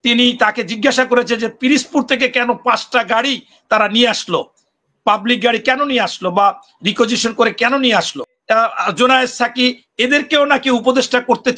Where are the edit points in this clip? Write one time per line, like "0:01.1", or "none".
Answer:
0:08.4